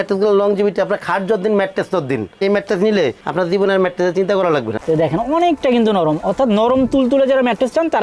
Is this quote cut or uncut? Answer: cut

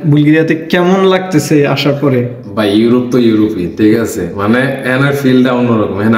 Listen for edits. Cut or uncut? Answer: uncut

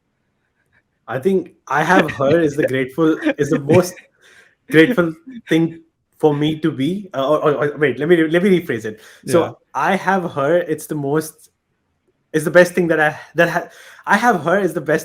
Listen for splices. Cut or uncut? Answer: uncut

